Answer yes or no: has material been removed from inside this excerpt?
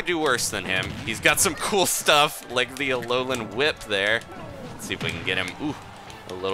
no